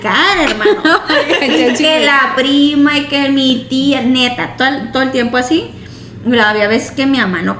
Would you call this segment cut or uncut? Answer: uncut